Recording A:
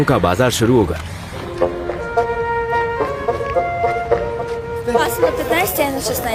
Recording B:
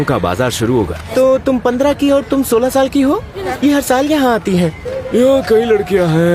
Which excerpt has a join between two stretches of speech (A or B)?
B